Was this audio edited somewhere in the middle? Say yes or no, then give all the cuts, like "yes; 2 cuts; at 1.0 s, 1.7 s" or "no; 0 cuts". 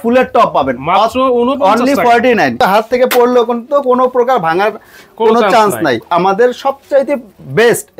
yes; 2 cuts; at 2.6 s, 6.1 s